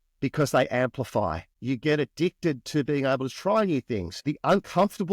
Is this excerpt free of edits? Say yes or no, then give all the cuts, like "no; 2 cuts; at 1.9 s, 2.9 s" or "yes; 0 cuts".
no; 2 cuts; at 1.5 s, 4.1 s